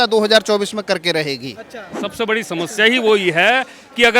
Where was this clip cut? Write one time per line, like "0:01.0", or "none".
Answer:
0:01.8